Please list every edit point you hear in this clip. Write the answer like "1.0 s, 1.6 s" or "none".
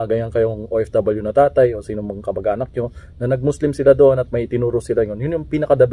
none